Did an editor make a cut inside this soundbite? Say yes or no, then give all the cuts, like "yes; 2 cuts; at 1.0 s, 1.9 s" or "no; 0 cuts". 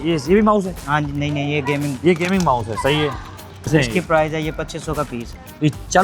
yes; 1 cut; at 3.6 s